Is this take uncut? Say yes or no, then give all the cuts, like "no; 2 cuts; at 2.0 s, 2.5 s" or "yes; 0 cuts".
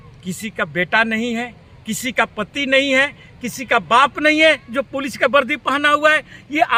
yes; 0 cuts